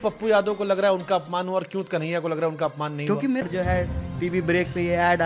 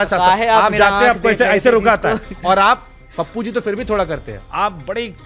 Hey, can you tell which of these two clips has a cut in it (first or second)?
first